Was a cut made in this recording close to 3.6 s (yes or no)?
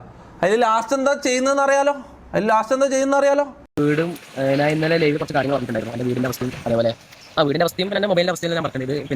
yes